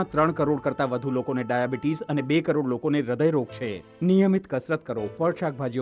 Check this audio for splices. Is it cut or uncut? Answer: uncut